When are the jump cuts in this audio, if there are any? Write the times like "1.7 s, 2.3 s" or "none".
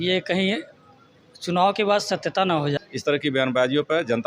2.8 s